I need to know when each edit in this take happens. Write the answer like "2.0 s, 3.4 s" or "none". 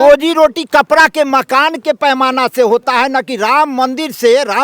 none